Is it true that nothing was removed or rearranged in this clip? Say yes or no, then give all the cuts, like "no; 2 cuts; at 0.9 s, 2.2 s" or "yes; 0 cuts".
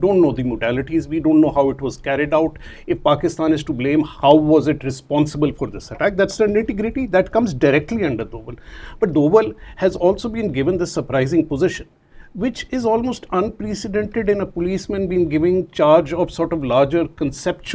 yes; 0 cuts